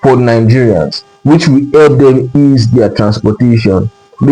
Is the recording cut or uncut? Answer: uncut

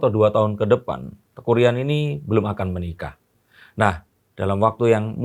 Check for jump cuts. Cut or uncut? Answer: uncut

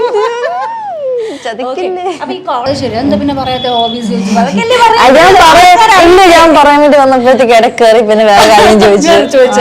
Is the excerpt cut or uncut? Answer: cut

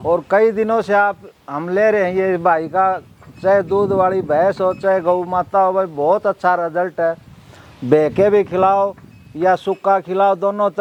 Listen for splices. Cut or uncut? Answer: uncut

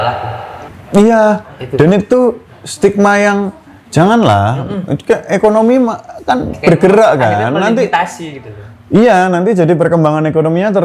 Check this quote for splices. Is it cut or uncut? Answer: uncut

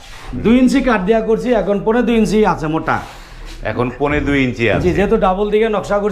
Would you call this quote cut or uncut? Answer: uncut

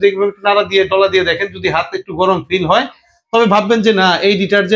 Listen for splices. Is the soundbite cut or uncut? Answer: uncut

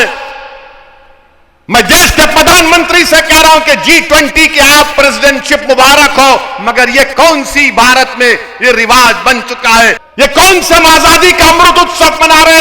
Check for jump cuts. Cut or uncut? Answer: cut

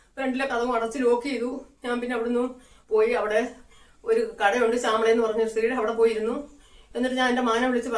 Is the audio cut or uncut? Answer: uncut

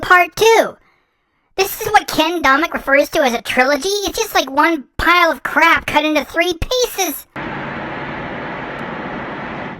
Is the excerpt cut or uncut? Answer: uncut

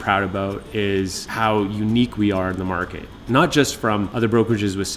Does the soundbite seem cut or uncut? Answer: cut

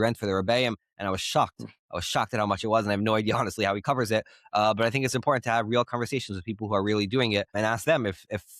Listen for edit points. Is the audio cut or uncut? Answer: uncut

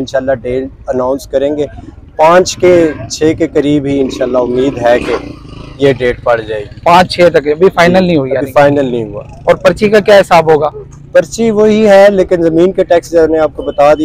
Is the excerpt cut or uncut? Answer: uncut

